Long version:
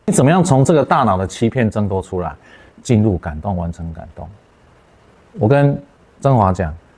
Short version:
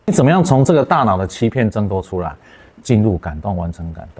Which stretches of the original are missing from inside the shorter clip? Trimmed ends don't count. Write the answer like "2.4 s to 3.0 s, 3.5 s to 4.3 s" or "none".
none